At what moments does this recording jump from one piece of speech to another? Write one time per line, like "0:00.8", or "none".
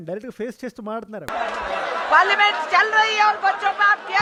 none